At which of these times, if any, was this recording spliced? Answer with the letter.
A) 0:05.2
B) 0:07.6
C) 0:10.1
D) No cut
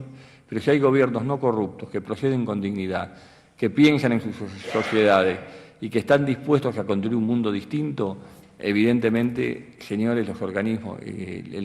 A